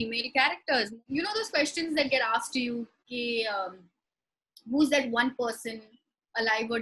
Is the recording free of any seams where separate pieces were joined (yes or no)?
no